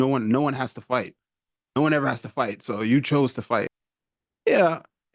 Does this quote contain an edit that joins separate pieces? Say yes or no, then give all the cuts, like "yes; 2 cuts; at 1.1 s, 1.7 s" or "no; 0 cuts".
yes; 1 cut; at 3.7 s